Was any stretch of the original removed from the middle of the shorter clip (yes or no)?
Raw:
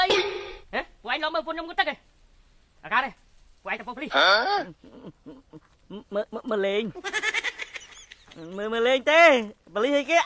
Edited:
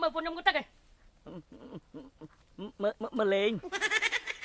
yes